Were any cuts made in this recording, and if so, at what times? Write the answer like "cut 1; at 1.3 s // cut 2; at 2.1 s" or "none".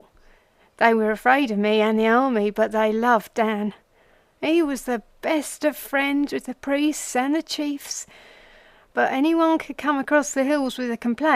cut 1; at 1.3 s